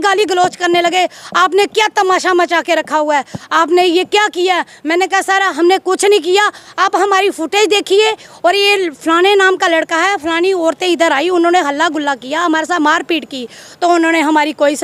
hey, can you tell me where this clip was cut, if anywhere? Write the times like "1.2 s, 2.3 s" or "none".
none